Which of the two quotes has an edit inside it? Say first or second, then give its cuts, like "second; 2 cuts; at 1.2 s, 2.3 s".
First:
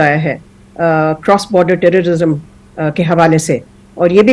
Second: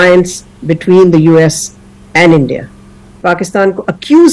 second; 1 cut; at 3.1 s